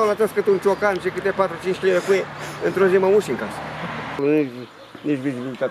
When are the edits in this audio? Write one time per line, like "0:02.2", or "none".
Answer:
0:04.2